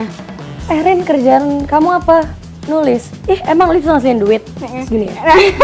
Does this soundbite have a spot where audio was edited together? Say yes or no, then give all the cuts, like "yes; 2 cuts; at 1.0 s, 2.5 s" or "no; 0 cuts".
no; 0 cuts